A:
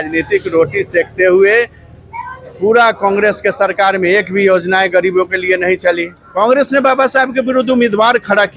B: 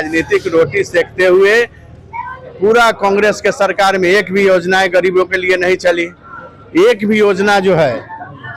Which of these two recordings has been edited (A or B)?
A